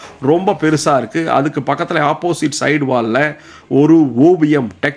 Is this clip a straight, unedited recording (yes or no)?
yes